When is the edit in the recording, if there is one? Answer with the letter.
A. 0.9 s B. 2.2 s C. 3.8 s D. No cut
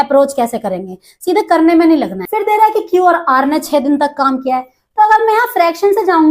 B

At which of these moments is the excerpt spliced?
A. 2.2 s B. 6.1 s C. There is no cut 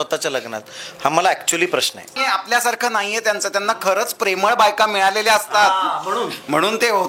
A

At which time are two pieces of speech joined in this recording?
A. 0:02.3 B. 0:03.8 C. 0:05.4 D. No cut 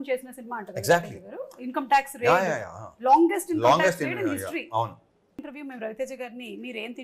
C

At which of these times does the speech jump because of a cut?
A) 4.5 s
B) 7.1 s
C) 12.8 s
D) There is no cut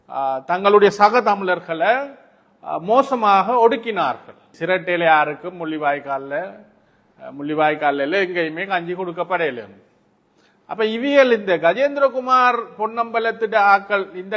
A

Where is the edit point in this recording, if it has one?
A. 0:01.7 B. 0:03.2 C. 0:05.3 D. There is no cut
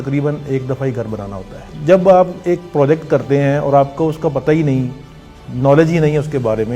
A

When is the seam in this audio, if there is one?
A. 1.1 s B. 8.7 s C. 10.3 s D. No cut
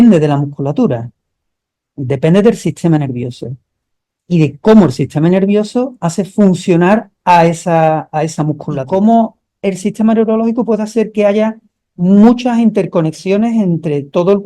B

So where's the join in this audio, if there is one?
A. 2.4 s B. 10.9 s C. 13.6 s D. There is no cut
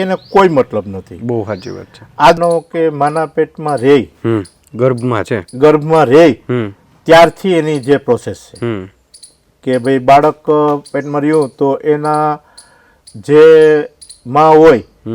A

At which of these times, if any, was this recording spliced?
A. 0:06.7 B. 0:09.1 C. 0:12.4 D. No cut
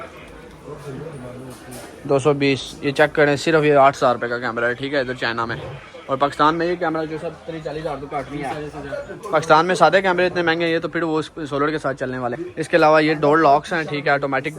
C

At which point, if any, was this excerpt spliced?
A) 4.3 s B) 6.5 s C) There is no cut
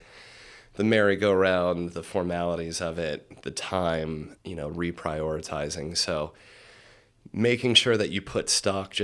A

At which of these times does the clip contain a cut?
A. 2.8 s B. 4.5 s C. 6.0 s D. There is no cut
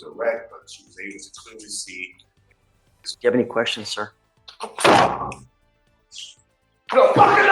A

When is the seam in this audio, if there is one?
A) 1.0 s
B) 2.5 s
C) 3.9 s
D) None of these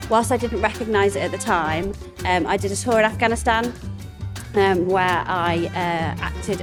D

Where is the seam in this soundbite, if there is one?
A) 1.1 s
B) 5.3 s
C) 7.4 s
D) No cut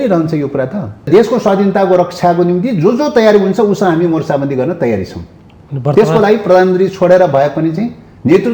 A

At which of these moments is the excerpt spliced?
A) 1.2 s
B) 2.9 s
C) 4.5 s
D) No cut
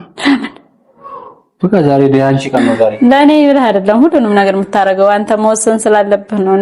B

